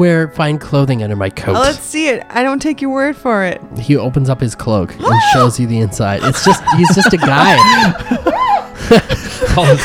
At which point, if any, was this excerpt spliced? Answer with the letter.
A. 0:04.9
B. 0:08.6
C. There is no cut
C